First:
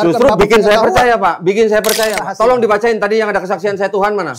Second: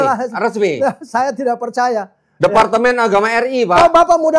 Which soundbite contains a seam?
first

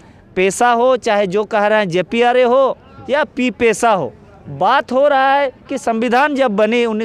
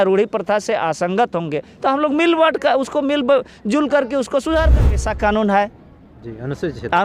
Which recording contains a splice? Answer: second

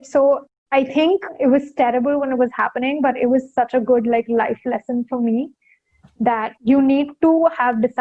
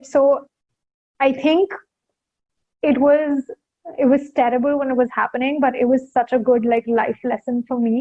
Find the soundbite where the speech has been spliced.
first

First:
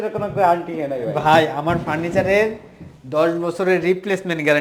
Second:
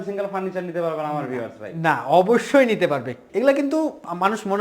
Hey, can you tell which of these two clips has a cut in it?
second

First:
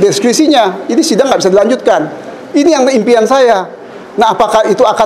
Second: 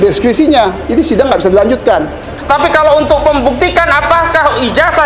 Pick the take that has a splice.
second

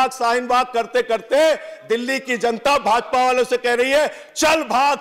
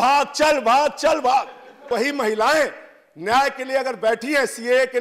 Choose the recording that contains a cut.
second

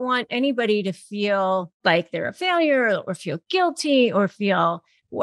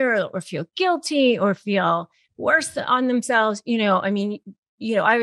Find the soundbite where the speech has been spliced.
first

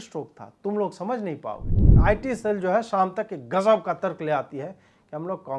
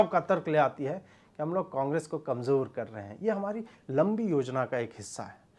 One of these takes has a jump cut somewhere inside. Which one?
first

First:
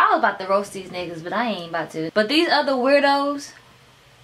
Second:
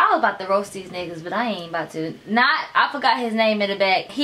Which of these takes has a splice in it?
first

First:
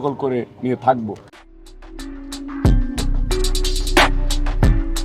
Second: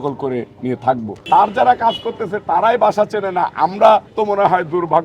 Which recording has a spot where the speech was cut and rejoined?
second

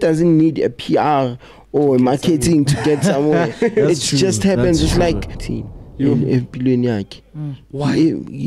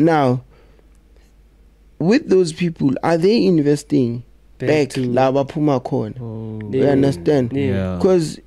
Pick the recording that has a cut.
first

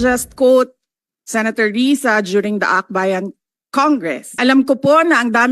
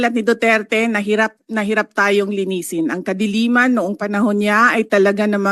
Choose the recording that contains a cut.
first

